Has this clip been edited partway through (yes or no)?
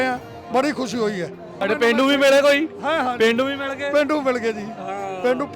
yes